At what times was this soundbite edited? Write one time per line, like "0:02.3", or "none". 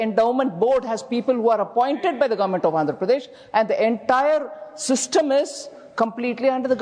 none